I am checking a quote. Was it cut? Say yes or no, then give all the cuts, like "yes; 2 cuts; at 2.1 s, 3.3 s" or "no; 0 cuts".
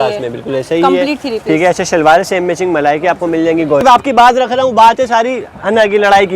yes; 1 cut; at 3.8 s